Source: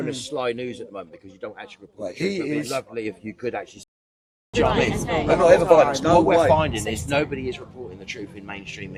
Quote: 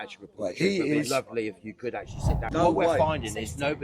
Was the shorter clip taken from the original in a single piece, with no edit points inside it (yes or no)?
no